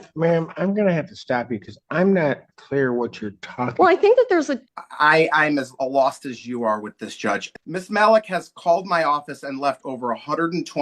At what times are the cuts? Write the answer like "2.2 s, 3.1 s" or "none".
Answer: 4.6 s, 7.5 s